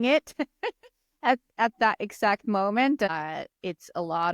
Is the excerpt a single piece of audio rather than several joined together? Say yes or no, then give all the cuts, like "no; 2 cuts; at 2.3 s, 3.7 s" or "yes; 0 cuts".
no; 1 cut; at 3.1 s